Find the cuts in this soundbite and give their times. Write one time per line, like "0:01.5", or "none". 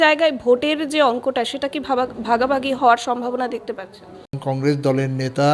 0:04.4